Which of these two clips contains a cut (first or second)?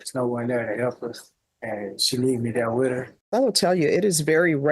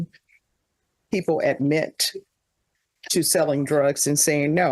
first